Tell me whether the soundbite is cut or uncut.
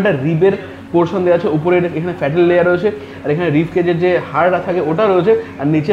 uncut